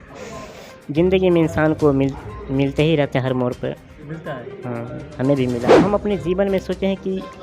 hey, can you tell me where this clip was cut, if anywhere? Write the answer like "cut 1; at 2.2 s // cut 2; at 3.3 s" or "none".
cut 1; at 5.6 s